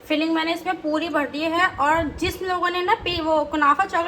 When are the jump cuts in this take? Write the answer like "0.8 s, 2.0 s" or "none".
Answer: none

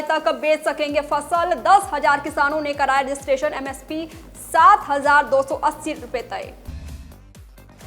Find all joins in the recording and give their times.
6.6 s

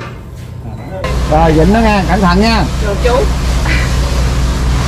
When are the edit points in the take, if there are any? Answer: 1.1 s

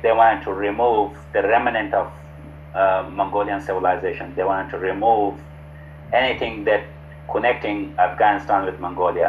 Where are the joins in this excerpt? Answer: none

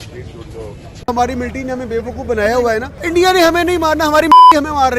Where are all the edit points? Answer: 1.0 s

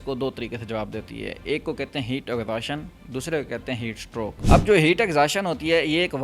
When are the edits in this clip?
4.4 s

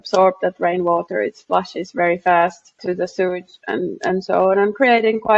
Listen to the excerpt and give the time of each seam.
2.8 s

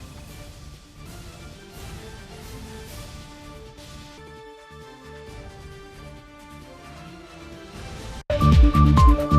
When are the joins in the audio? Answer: 8.1 s

